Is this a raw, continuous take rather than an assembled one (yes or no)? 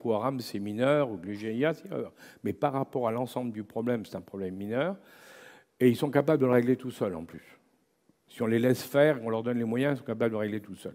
yes